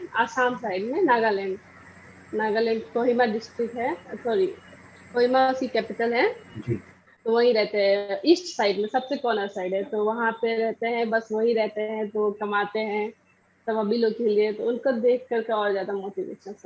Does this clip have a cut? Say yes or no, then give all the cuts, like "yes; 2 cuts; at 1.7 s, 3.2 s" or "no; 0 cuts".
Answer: no; 0 cuts